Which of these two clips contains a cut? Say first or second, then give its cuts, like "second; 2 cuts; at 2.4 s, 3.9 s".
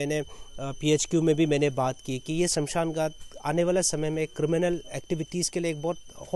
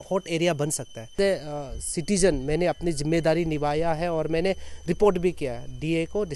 second; 1 cut; at 1.1 s